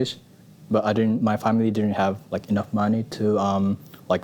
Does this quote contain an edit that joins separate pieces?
no; 0 cuts

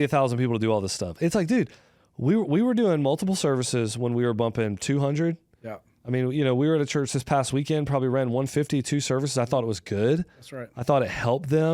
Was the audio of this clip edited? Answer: no; 0 cuts

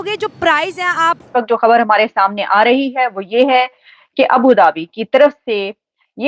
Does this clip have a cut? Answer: yes; 1 cut; at 1.2 s

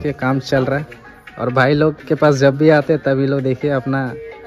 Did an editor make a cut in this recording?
no; 0 cuts

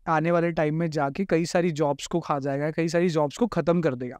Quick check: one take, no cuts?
yes; 0 cuts

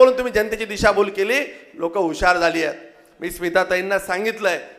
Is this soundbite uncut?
yes; 0 cuts

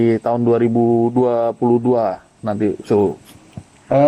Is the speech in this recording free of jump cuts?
yes; 0 cuts

